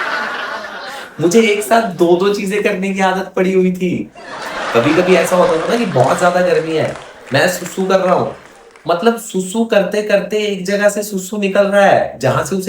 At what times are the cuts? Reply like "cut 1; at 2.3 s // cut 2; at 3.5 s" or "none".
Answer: cut 1; at 1.1 s